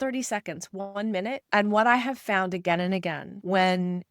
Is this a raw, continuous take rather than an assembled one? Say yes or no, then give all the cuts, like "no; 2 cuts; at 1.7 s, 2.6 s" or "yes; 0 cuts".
no; 1 cut; at 1.5 s